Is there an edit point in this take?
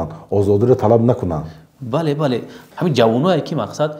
yes; 1 cut; at 2.6 s

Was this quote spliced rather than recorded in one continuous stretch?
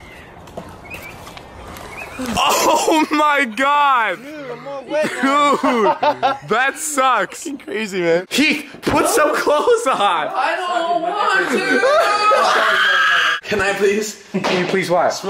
yes; 1 cut; at 11.0 s

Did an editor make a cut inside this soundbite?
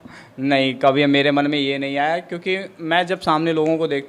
no; 0 cuts

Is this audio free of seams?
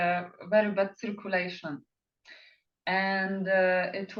yes; 0 cuts

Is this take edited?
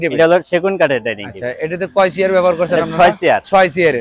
no; 0 cuts

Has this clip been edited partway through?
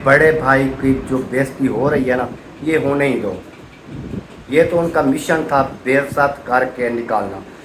no; 0 cuts

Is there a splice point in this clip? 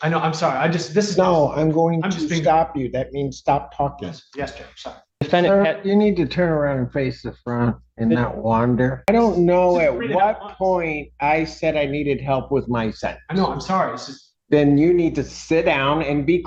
yes; 2 cuts; at 5.2 s, 9.1 s

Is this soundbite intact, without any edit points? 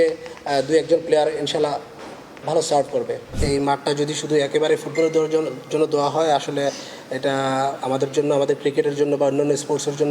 no; 1 cut; at 3.4 s

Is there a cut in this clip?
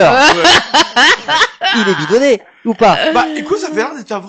no; 0 cuts

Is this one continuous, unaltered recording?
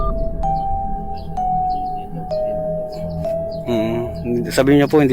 no; 1 cut; at 3.6 s

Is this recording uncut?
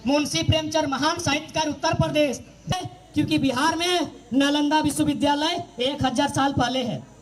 no; 1 cut; at 2.7 s

